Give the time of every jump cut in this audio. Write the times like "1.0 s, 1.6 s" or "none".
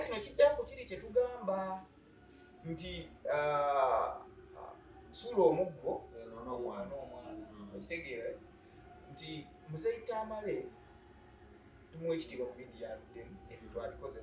none